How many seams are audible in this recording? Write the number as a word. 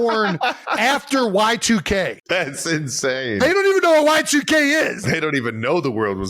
two